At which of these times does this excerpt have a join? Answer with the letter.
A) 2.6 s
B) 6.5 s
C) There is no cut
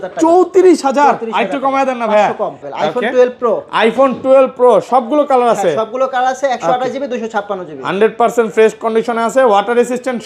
A